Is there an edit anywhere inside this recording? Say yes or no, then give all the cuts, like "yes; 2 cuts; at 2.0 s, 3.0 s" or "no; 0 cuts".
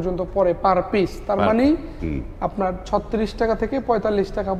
no; 0 cuts